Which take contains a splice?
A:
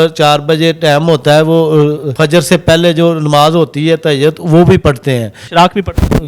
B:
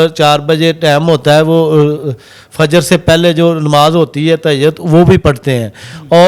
A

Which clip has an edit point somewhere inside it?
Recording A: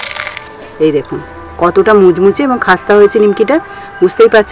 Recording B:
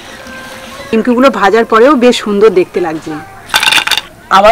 B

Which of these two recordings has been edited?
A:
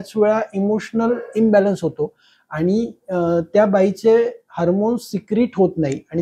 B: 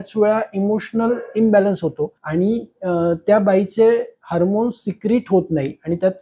B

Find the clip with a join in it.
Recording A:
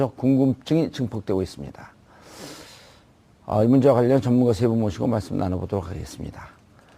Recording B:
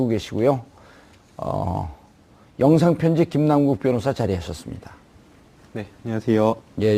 A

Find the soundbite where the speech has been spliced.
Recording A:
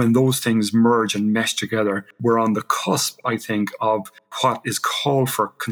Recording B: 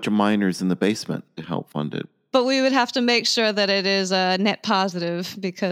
B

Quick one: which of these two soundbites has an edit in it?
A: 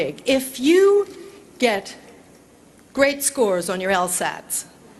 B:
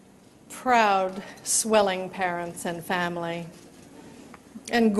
B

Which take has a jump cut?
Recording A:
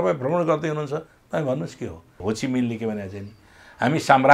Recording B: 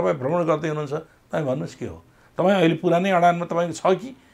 A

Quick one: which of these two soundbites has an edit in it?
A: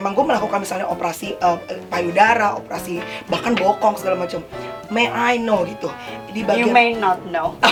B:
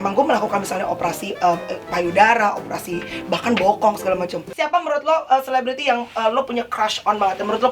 B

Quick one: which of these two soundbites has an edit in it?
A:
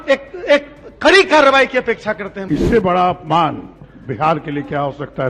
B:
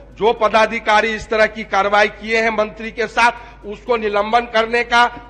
A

